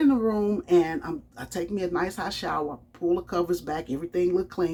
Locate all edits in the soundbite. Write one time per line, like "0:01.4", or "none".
none